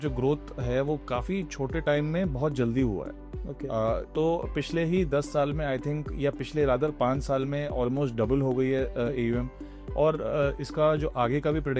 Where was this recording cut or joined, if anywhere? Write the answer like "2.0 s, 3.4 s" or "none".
none